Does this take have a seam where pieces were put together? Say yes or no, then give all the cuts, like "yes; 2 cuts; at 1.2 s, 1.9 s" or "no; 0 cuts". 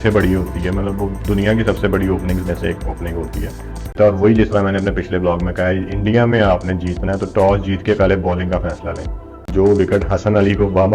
yes; 2 cuts; at 3.9 s, 9.4 s